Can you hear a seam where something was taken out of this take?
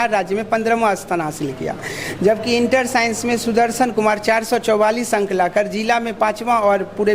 no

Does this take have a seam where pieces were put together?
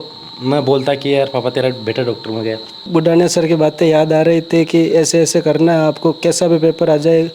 yes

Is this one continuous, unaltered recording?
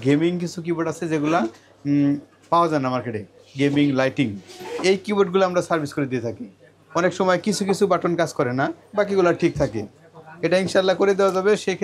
yes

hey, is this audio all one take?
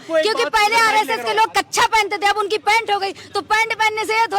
yes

